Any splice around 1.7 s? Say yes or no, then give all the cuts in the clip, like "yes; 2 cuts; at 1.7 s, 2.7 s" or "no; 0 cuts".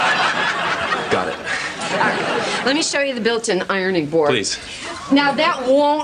no; 1 cut; at 3.9 s